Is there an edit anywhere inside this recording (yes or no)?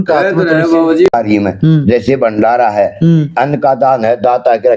yes